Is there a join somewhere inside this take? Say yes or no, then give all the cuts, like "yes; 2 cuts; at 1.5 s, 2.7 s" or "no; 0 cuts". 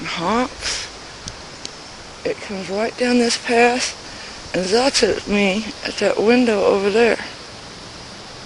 yes; 1 cut; at 1.0 s